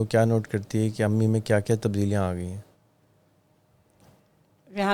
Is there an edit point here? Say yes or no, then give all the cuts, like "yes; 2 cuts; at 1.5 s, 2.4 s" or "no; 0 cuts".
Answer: no; 0 cuts